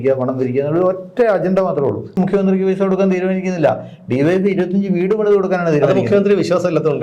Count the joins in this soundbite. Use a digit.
1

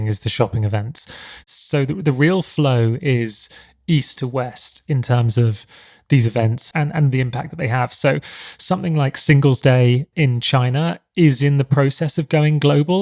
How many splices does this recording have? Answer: 1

